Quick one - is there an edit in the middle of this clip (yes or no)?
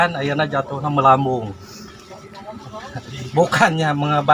no